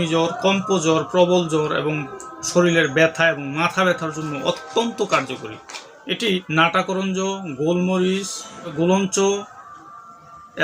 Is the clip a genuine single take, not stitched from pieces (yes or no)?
no